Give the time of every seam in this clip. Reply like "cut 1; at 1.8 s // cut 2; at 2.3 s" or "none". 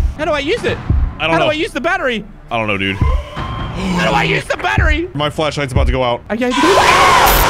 cut 1; at 5.2 s // cut 2; at 6.2 s